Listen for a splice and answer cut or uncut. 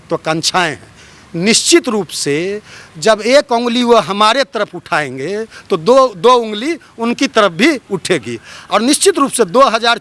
uncut